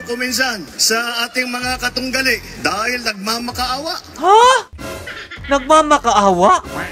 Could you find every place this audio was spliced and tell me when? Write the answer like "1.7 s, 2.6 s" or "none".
4.0 s